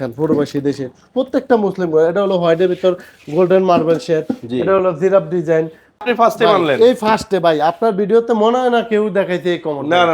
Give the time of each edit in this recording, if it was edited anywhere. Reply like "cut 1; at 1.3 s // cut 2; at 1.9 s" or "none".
cut 1; at 6.0 s